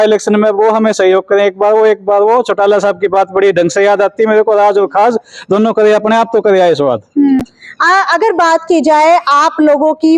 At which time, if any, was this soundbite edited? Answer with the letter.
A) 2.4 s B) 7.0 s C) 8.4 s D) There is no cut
D